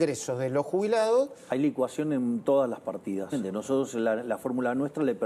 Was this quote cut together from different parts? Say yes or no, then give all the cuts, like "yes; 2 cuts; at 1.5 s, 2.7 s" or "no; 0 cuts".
yes; 1 cut; at 3.3 s